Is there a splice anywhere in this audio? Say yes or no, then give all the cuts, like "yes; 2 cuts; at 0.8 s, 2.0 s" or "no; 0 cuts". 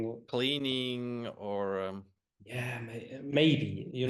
no; 0 cuts